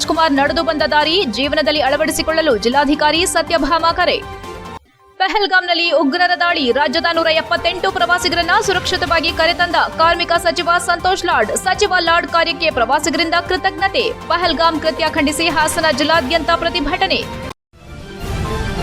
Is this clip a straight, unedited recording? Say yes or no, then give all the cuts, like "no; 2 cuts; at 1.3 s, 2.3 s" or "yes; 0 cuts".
no; 1 cut; at 17.5 s